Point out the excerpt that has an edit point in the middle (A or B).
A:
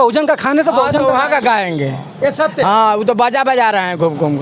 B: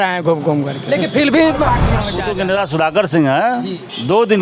B